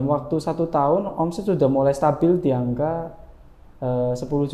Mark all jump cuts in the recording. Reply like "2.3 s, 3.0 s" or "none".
none

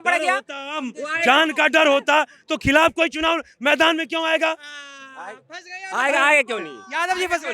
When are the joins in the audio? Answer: none

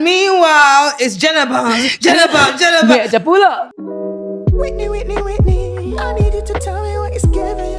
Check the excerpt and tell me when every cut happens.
3.6 s

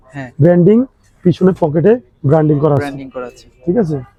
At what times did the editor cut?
none

